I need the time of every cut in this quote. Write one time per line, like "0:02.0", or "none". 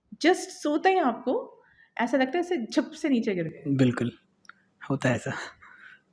none

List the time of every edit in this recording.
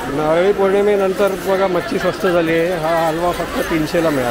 none

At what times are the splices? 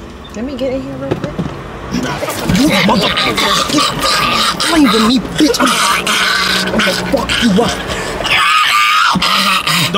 none

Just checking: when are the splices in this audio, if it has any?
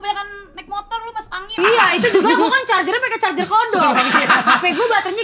0:01.6

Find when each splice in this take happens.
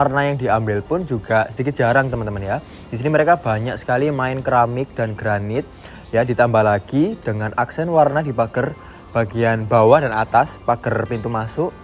none

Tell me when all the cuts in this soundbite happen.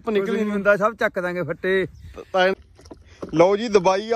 0:02.6

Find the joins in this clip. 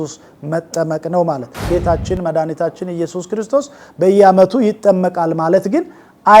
0:01.6

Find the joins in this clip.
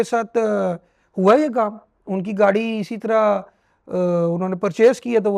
none

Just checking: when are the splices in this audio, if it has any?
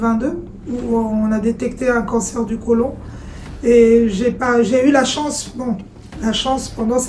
none

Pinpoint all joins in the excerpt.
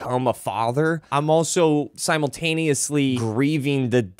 0:01.0
0:02.0
0:03.2

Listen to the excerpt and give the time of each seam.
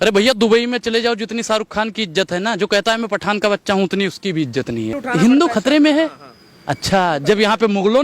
0:05.0

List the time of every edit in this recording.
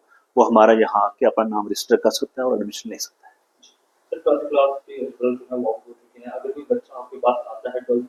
none

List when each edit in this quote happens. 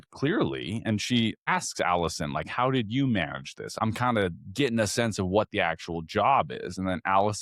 0:01.4
0:03.8

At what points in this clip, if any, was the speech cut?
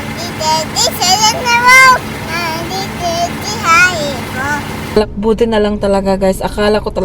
0:04.9

